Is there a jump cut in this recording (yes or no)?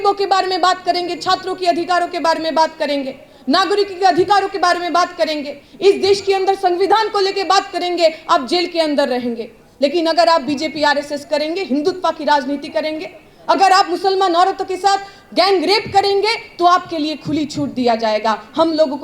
no